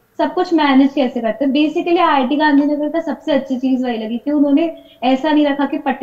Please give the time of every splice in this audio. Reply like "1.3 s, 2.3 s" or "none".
none